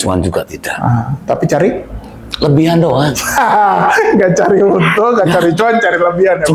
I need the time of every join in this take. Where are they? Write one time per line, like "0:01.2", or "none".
none